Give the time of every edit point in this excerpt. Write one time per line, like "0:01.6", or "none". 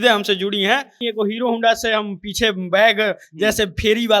0:01.0

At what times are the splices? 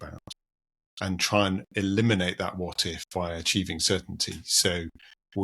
none

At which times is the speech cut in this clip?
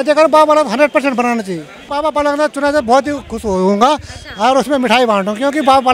0:01.8

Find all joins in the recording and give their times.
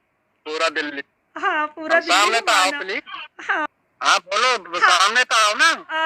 0:03.7

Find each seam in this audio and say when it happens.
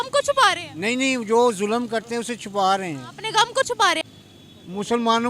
0:04.1

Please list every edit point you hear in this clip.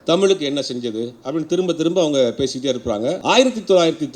0:03.2

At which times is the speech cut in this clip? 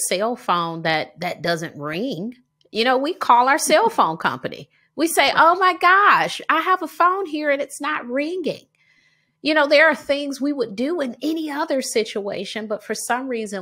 none

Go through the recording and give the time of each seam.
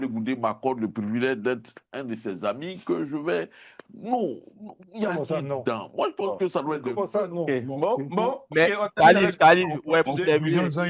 none

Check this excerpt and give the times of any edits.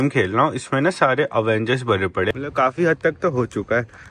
0:02.3

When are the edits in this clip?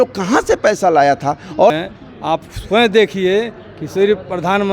0:01.7

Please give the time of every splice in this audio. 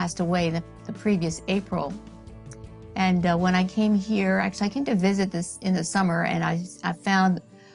0:05.8

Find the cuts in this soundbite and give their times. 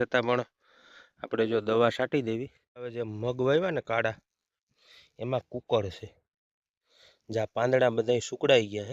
0:03.1

